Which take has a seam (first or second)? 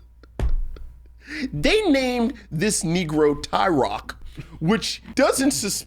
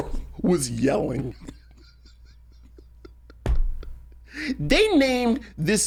first